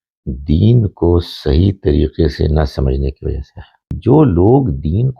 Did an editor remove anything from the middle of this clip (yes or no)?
yes